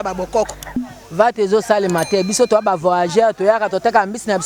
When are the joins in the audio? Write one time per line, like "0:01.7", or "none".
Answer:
0:00.9